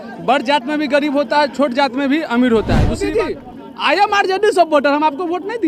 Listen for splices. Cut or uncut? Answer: cut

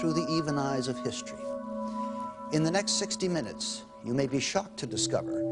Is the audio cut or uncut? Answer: uncut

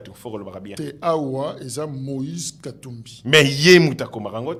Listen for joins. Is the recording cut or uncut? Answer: uncut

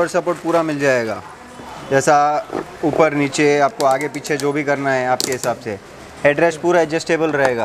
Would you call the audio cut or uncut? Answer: uncut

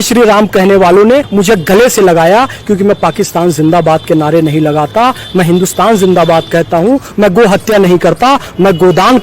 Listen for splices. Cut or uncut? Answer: cut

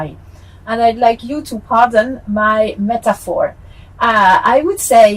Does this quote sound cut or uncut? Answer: uncut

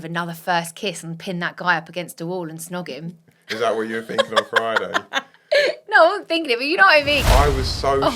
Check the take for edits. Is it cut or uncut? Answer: cut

